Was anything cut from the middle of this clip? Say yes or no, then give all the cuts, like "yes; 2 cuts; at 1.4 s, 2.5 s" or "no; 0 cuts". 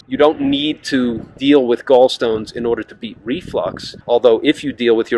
yes; 2 cuts; at 1.3 s, 3.9 s